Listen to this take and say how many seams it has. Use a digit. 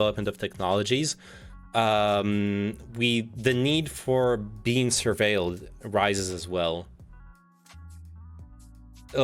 0